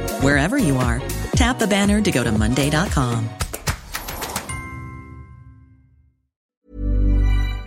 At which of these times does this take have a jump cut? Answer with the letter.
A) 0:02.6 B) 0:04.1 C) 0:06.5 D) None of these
C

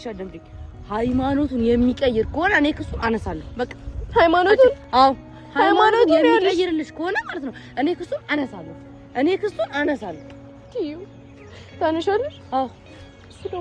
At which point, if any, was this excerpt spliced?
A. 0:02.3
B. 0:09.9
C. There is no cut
C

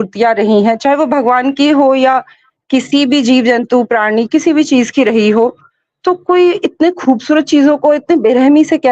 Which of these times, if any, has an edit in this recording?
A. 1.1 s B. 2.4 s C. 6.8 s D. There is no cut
D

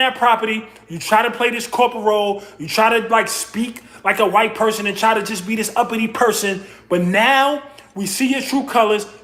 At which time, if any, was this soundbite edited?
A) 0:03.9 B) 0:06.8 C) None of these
C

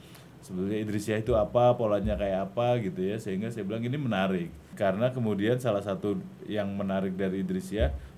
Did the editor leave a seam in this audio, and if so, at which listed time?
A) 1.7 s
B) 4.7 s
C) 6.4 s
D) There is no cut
B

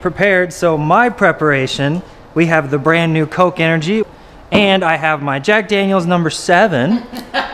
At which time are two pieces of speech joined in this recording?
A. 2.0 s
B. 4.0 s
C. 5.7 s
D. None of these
B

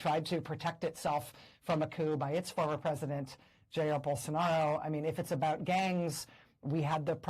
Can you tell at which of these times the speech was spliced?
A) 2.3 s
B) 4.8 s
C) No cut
B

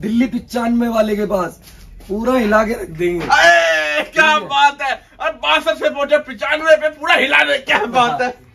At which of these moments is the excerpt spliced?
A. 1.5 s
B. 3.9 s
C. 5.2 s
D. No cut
D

